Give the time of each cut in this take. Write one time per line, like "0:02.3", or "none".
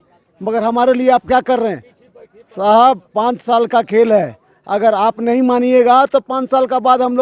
none